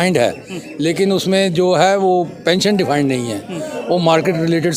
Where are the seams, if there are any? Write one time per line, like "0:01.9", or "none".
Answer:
none